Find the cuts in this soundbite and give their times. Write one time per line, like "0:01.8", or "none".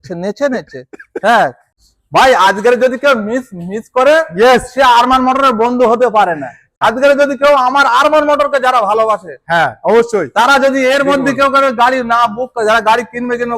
0:01.8
0:06.8